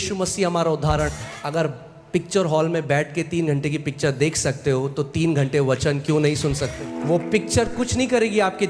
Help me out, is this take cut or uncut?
cut